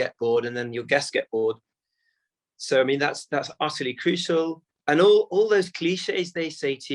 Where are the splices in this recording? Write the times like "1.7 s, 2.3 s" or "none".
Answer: 4.7 s